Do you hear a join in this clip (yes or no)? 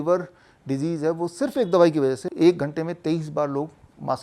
yes